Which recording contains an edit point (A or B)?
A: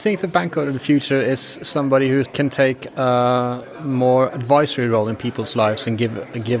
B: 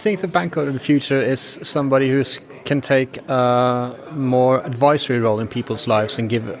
A